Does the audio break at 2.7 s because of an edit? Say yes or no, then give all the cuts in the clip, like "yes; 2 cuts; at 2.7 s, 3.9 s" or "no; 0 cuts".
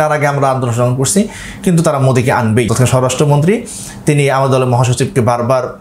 yes; 1 cut; at 2.7 s